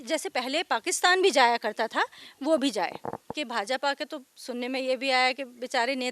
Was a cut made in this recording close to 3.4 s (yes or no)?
yes